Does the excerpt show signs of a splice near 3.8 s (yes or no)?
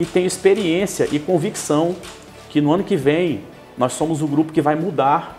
no